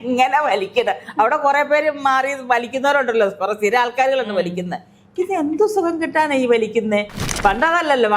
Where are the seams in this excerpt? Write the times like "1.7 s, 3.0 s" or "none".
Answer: 7.2 s